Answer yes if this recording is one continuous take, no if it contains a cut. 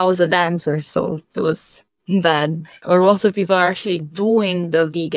no